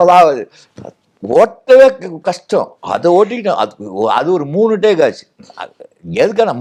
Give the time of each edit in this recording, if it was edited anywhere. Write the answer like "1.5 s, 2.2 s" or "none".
none